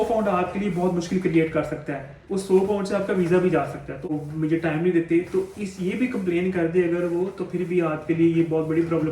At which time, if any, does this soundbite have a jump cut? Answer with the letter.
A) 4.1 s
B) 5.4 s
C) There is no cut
A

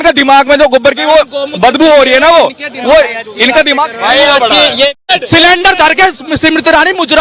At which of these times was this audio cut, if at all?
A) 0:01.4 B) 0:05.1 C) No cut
B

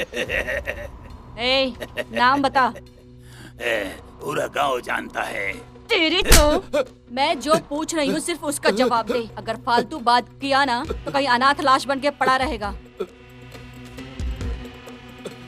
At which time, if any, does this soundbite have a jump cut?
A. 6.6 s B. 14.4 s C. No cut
C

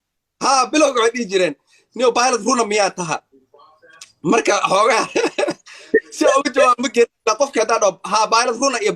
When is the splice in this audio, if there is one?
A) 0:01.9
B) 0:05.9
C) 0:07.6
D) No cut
D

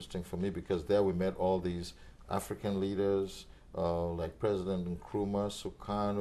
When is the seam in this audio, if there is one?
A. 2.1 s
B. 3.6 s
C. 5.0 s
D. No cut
D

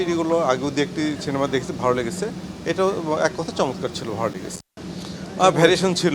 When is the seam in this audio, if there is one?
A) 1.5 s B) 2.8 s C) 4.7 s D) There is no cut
C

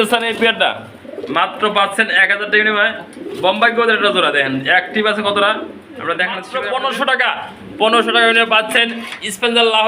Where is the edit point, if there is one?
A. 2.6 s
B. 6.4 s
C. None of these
B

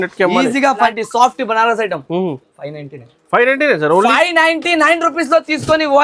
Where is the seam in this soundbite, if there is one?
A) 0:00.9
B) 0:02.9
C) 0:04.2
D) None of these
A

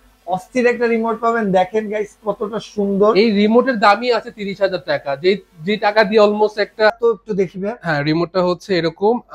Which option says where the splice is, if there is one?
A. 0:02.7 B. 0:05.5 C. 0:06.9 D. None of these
C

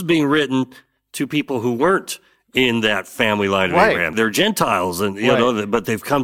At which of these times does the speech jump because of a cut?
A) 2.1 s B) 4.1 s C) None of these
B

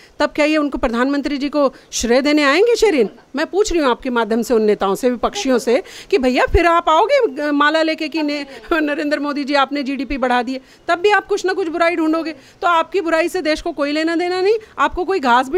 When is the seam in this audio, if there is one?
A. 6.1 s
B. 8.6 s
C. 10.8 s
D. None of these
D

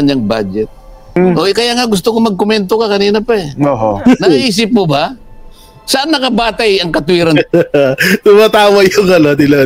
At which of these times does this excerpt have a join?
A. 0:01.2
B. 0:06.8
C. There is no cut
A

